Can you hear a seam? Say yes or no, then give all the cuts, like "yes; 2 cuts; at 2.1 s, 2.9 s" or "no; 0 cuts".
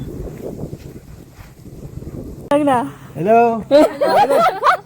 yes; 1 cut; at 2.5 s